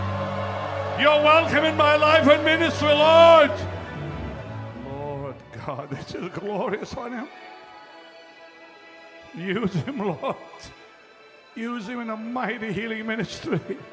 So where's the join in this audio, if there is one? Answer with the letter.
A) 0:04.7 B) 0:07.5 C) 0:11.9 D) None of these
A